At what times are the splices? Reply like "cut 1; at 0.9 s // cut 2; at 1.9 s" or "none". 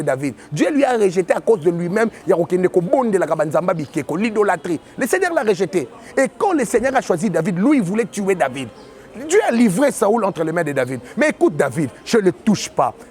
none